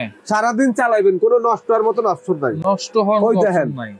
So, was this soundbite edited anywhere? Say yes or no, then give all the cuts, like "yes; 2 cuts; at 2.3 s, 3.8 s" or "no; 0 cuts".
no; 0 cuts